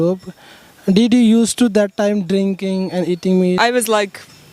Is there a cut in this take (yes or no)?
yes